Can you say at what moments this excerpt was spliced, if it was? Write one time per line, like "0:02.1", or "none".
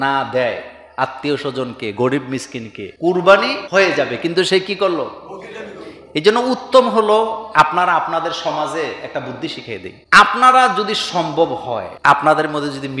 none